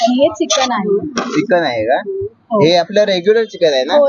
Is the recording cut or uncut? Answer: uncut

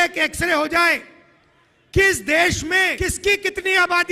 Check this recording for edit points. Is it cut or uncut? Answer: cut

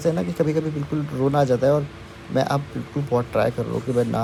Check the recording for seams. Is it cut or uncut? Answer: uncut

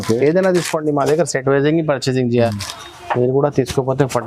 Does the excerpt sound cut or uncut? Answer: cut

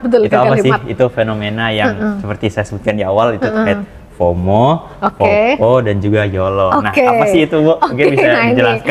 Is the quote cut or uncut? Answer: uncut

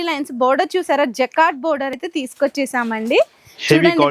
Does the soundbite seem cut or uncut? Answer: cut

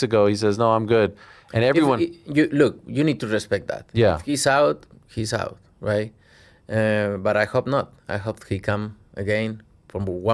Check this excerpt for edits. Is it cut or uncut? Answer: uncut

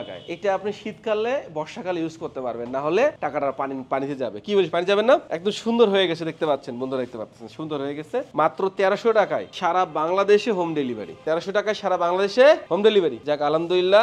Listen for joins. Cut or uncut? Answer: uncut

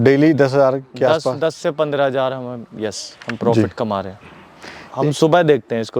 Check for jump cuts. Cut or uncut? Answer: cut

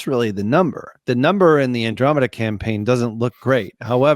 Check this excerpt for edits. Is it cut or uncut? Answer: cut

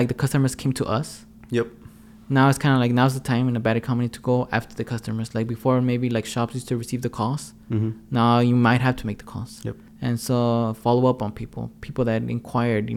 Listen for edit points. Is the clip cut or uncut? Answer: uncut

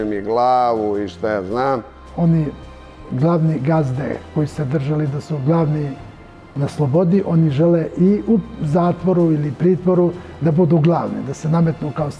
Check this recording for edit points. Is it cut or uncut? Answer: cut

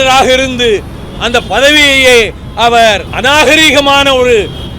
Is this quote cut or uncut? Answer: cut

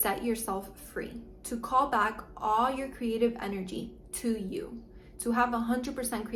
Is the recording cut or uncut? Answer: uncut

